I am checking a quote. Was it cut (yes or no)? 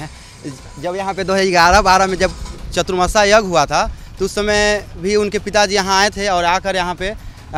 no